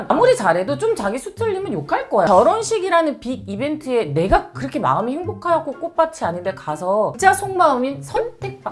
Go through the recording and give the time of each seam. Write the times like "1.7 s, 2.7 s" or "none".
2.3 s, 7.1 s